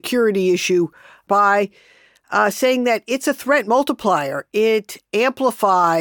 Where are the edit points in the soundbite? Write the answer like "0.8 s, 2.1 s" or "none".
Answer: 1.2 s

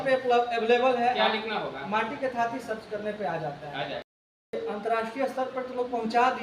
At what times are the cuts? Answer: 4.5 s

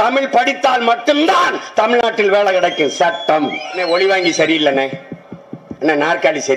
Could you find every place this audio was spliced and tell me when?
3.7 s

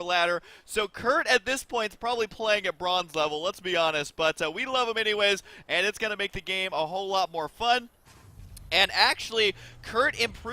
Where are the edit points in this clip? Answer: none

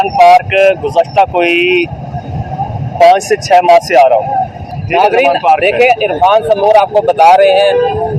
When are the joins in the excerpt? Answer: 4.7 s

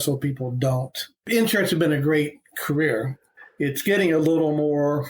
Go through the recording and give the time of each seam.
1.1 s

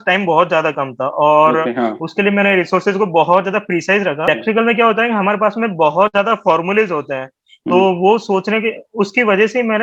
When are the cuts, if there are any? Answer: 4.3 s

